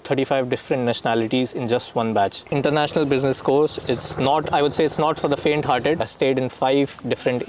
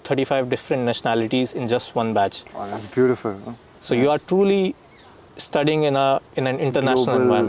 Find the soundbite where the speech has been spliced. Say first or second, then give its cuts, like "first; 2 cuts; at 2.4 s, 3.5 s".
first; 2 cuts; at 2.5 s, 6.1 s